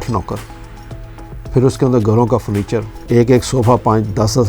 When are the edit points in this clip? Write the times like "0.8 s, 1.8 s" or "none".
2.9 s